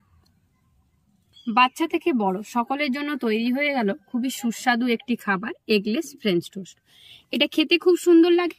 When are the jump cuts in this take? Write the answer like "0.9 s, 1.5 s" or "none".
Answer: 1.3 s